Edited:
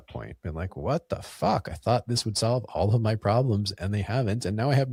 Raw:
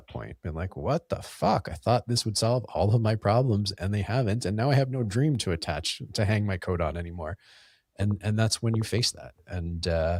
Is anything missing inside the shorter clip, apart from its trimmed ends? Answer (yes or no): no